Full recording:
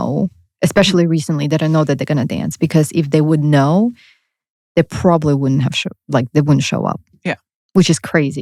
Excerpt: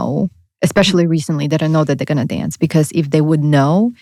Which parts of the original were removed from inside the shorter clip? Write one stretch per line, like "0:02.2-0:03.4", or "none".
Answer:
none